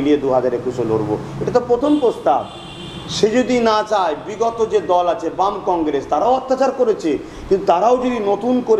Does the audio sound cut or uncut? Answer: uncut